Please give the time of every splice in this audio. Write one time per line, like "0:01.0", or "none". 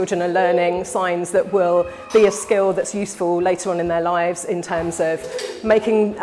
none